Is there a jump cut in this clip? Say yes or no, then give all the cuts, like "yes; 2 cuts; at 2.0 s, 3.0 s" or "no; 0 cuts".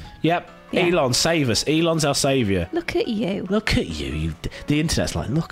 yes; 1 cut; at 2.6 s